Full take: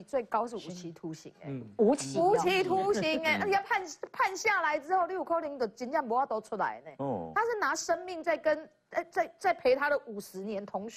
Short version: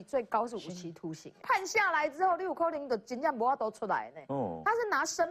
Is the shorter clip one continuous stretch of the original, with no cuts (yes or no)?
no